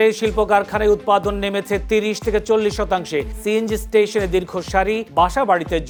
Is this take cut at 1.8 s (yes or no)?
no